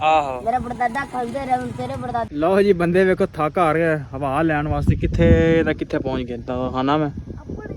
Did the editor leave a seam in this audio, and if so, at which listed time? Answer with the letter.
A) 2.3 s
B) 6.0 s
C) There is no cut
A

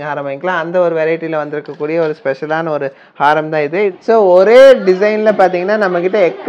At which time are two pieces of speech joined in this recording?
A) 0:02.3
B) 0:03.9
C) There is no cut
B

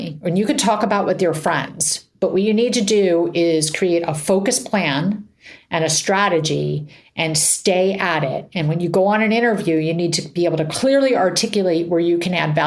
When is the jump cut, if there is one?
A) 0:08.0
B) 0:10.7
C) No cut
B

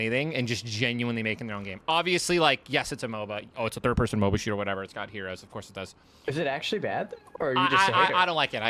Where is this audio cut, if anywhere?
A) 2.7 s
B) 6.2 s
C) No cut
B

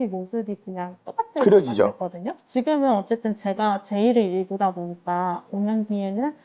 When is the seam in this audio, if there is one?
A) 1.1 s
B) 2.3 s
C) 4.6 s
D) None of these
B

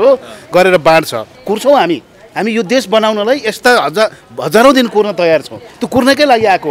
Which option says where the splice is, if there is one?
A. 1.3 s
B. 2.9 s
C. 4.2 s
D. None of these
A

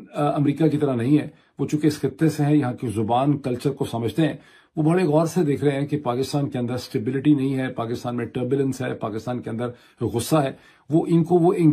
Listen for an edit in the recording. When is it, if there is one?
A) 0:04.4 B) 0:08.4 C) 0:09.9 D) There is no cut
D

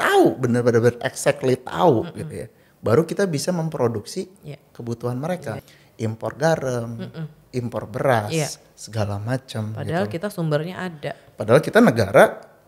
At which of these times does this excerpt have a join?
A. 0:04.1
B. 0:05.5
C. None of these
B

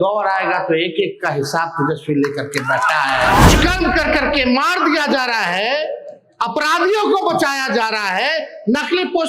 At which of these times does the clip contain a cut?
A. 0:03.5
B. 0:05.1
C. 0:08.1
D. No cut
A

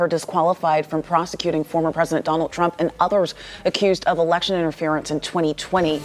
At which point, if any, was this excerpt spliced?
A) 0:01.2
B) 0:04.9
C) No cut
C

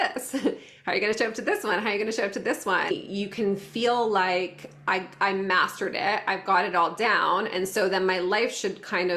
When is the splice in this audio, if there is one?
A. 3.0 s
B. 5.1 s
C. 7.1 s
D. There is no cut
A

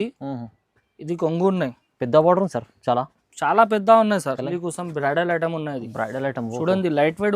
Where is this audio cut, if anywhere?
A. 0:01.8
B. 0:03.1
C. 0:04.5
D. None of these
C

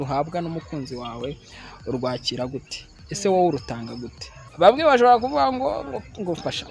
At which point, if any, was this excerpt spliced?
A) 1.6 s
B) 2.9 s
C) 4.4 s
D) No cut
C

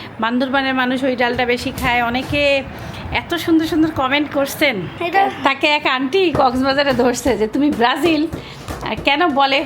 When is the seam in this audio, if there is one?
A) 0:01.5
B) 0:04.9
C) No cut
B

